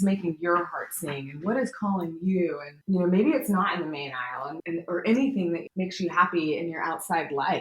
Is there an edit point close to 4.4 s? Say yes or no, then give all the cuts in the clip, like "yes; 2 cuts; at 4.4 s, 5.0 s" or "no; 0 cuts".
yes; 3 cuts; at 2.7 s, 4.4 s, 5.6 s